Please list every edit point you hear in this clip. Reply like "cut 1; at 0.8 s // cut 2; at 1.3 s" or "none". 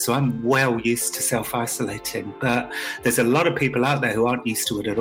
none